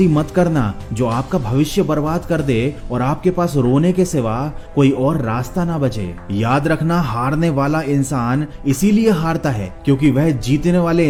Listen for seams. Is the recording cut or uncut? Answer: uncut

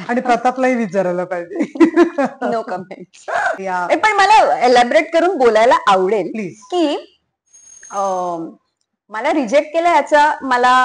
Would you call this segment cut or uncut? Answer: cut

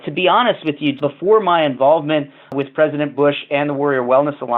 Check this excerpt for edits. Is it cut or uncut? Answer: cut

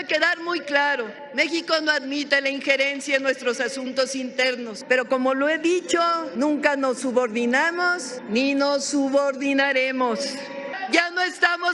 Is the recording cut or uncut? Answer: cut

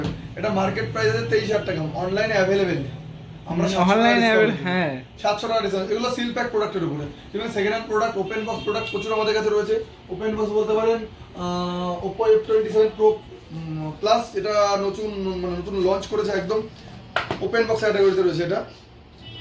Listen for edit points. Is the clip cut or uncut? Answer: uncut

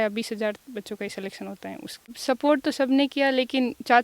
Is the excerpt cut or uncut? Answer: cut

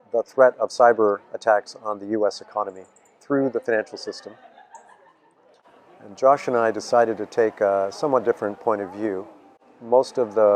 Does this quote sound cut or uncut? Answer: uncut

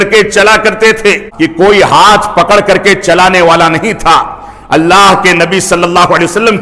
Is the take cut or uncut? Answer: cut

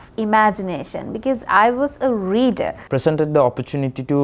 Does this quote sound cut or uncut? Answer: cut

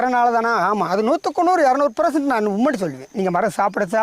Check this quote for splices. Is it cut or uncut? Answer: cut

